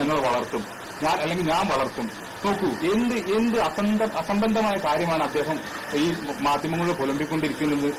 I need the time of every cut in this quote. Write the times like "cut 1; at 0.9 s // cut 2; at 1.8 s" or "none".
none